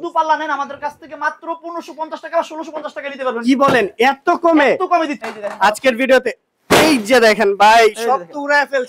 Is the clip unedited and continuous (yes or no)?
no